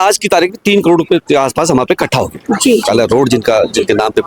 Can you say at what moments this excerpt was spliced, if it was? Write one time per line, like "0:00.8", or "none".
0:02.8